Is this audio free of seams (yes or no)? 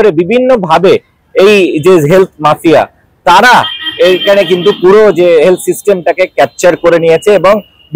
yes